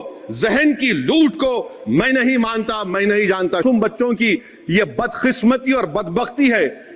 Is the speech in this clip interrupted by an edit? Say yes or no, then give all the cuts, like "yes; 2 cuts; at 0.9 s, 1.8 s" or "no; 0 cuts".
yes; 1 cut; at 3.6 s